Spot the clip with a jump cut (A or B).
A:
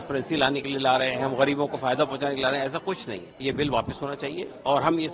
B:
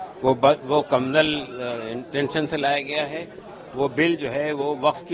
A